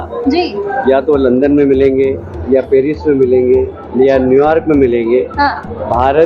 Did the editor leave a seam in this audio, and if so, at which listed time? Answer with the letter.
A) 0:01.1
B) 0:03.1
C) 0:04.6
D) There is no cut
D